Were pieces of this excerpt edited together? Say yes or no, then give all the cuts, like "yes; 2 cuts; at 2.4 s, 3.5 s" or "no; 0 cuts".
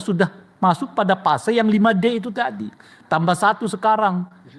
no; 0 cuts